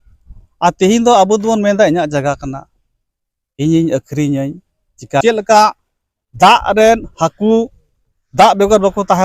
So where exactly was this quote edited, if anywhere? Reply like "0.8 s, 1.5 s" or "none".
5.2 s